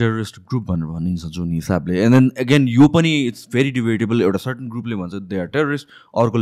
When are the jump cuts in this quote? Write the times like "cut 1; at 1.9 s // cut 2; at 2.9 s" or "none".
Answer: none